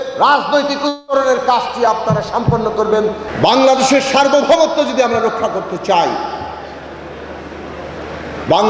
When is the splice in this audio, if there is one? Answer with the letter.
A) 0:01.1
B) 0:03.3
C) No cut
B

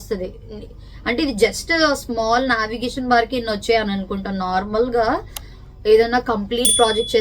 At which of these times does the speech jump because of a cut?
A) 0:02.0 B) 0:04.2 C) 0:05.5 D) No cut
D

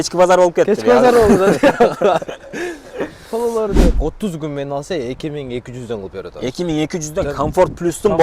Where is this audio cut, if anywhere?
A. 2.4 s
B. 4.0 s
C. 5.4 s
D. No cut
B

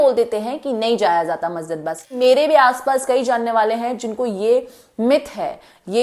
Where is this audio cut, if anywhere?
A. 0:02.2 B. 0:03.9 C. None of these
A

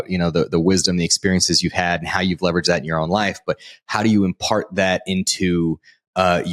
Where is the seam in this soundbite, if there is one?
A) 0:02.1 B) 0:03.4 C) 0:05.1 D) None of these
D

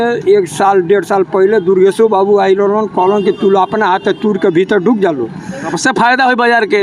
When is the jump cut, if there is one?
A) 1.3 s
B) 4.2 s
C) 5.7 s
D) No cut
C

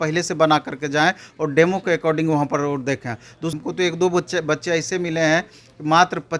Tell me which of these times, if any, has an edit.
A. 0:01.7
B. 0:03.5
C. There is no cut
B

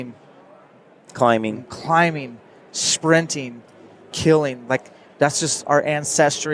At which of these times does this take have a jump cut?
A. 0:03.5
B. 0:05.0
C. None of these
C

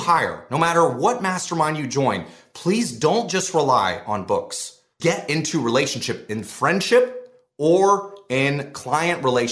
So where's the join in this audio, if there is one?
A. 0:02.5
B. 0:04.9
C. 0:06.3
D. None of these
B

